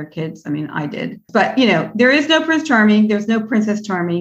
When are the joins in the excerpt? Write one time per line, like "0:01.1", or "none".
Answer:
none